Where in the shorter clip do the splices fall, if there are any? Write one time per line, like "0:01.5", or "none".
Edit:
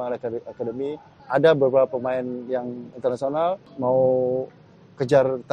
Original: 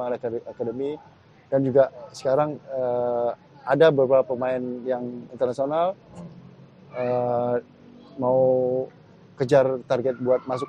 0:01.1
0:03.7